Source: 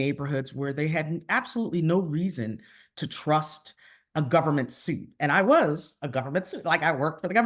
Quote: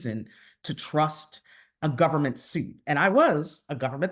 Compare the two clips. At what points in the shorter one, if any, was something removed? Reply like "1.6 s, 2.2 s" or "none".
none